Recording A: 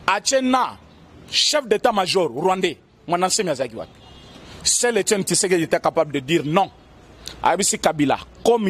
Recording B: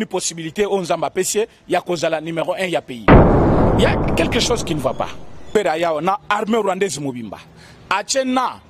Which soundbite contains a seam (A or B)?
B